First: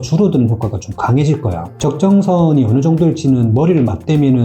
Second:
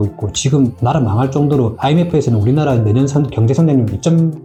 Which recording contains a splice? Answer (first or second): first